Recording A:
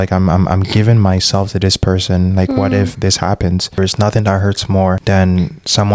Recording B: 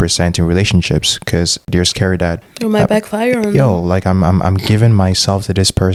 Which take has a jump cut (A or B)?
A